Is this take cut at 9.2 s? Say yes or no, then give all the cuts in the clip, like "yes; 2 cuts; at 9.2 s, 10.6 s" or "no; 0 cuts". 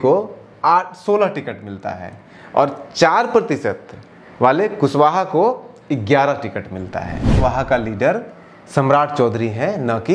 no; 1 cut; at 7.2 s